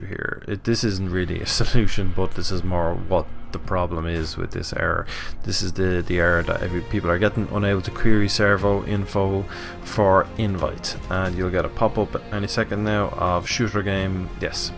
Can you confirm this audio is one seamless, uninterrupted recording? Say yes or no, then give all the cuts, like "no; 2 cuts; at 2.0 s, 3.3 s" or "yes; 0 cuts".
no; 1 cut; at 7.3 s